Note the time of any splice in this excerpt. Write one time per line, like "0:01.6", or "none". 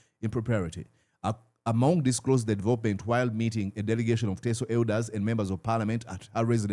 none